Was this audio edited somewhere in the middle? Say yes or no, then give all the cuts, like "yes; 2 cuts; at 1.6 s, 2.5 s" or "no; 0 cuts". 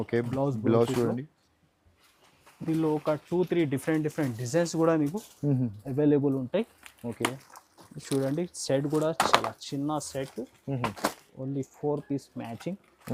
no; 0 cuts